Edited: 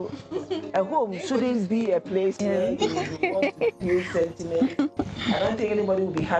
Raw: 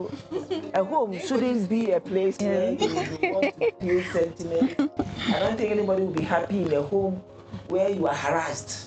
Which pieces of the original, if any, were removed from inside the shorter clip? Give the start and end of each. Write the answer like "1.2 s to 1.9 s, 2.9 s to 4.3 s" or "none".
none